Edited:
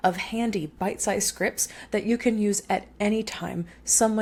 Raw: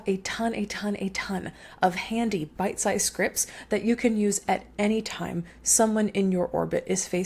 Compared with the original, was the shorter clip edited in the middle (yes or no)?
no